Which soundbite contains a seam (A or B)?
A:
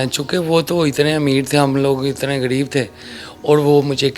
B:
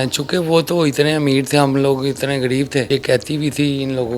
B